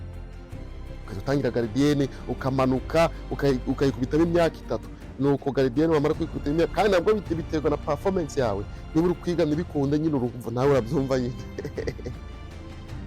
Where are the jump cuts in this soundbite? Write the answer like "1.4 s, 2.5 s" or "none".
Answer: 12.2 s